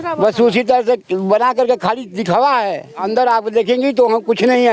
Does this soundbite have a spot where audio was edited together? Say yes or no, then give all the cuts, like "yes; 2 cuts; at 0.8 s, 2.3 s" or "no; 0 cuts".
yes; 1 cut; at 3.0 s